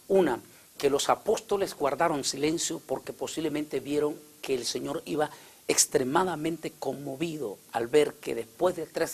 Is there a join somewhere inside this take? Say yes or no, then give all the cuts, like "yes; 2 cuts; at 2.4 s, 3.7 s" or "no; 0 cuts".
yes; 1 cut; at 5.7 s